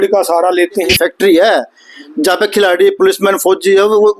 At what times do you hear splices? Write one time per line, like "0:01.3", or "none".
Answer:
0:00.9